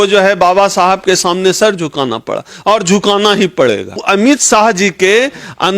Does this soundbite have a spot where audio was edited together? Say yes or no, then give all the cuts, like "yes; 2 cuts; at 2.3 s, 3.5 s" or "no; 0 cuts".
yes; 1 cut; at 4.0 s